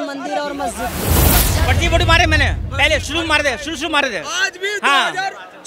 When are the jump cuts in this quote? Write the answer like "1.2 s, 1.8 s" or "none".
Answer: 1.3 s